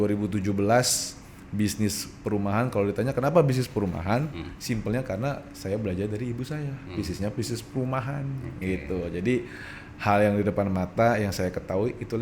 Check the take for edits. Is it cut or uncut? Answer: uncut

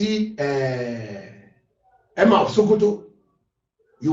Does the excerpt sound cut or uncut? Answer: uncut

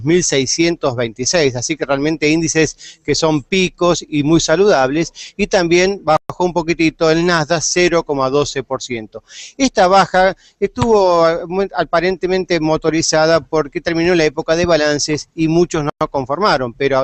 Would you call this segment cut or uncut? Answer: uncut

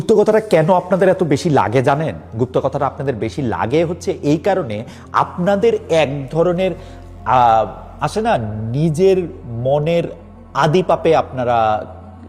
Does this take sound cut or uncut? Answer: uncut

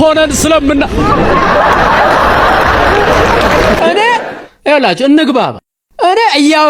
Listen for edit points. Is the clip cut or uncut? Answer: cut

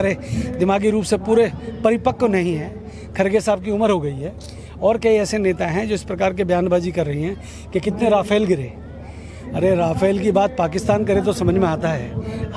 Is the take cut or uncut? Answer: uncut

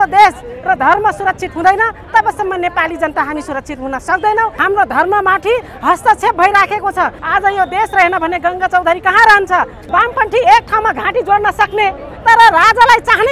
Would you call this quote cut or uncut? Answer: cut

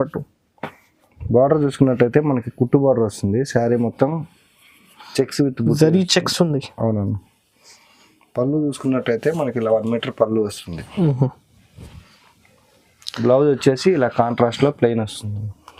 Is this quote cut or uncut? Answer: uncut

